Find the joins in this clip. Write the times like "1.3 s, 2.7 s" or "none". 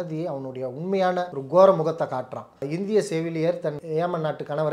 1.4 s, 2.5 s, 3.8 s